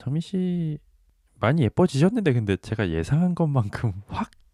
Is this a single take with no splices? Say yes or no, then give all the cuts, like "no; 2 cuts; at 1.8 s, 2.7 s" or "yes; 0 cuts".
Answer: yes; 0 cuts